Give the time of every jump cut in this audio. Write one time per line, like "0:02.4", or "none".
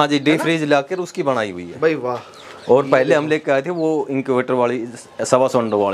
none